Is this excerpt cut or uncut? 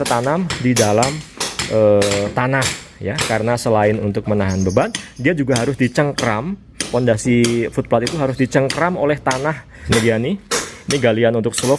cut